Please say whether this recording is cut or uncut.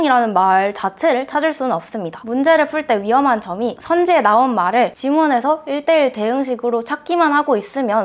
uncut